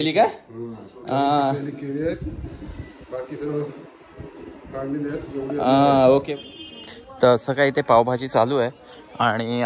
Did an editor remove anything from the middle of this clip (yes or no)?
yes